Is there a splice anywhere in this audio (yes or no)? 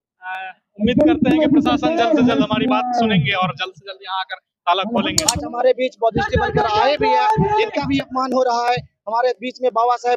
yes